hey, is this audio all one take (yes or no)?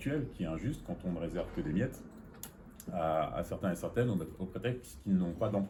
yes